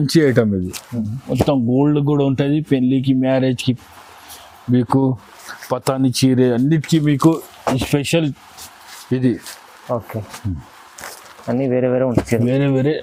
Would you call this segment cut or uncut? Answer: uncut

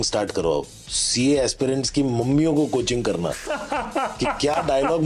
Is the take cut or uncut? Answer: uncut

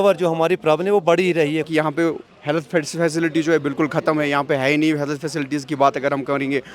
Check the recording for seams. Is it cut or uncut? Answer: cut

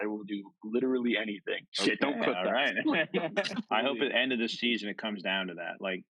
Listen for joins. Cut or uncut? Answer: cut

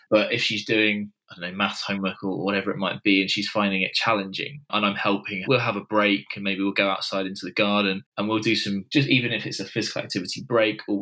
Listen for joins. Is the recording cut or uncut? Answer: cut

